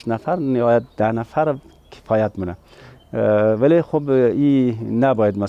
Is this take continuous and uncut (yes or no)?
yes